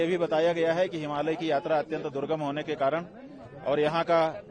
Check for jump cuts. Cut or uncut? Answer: uncut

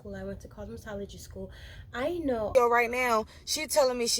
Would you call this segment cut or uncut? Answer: cut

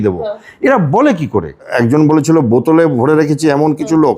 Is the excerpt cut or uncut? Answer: cut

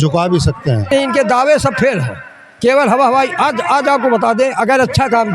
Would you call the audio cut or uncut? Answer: cut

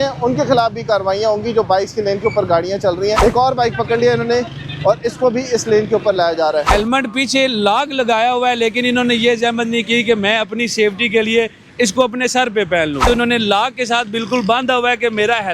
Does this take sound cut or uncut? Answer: cut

